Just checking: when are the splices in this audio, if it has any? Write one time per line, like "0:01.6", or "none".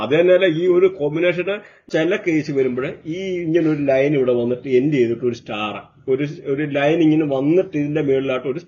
0:01.9